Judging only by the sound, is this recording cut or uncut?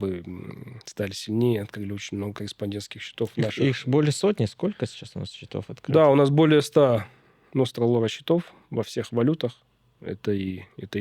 uncut